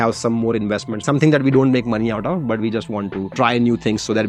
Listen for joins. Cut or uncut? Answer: uncut